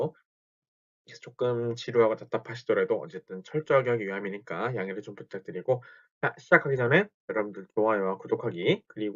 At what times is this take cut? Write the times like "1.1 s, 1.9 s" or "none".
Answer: 8.2 s